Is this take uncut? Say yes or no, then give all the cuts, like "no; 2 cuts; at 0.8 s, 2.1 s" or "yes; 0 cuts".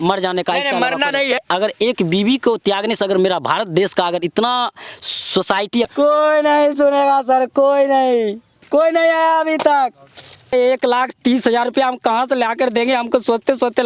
no; 3 cuts; at 1.4 s, 5.9 s, 10.5 s